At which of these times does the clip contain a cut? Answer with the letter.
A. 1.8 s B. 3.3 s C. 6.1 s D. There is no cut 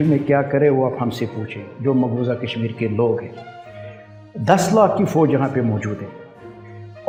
D